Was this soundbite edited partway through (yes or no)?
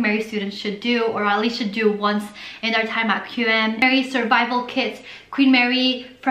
yes